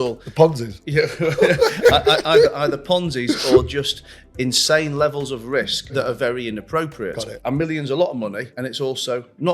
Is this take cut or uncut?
cut